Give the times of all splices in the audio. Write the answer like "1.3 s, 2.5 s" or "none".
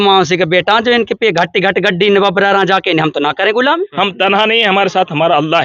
3.9 s